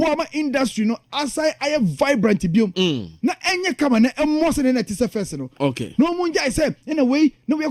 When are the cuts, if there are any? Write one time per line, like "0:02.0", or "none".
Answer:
none